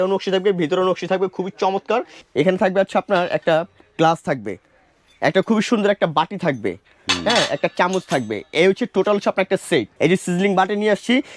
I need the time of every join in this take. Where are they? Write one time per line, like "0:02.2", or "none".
0:02.2
0:09.9